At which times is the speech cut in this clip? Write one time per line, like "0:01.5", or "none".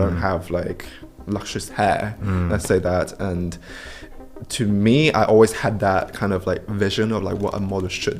none